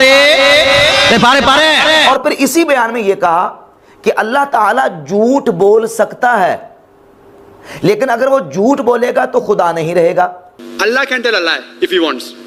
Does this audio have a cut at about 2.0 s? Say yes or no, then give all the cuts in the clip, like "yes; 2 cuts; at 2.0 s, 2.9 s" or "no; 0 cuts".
yes; 1 cut; at 2.0 s